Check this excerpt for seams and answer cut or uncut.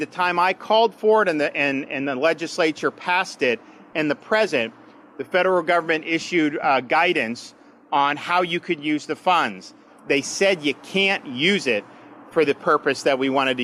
uncut